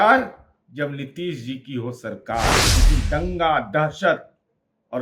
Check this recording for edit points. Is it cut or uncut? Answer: cut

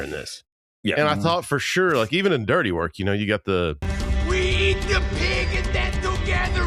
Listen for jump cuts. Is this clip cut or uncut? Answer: uncut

